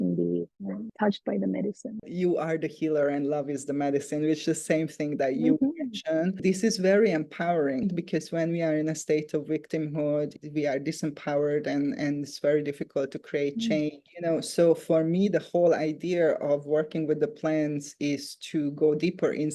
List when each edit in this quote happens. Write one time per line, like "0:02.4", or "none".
0:02.1
0:06.4
0:07.9